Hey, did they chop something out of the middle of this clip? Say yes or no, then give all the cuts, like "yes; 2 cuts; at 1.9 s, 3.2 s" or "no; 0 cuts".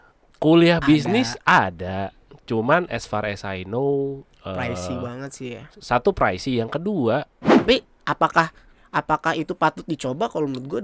yes; 1 cut; at 7.4 s